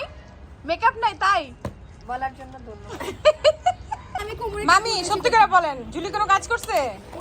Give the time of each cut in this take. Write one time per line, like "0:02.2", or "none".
0:04.3